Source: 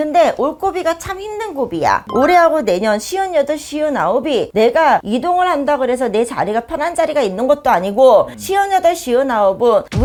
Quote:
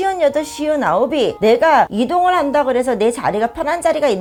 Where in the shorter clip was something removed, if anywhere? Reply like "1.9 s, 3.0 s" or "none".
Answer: none

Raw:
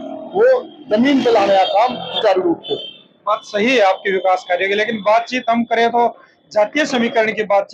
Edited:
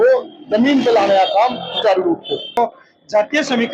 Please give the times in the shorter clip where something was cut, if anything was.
2.6 s

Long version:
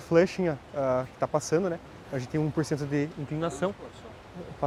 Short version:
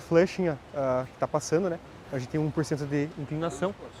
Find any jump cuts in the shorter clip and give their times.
none

